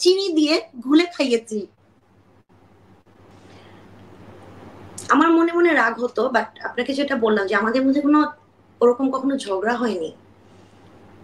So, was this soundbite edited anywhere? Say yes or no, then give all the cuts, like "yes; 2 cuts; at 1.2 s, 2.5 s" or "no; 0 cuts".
yes; 1 cut; at 3.3 s